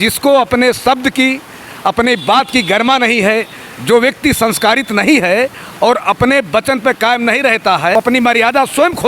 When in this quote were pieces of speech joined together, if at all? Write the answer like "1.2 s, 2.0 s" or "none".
8.0 s